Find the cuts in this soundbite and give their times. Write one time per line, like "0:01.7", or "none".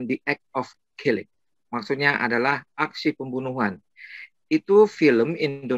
none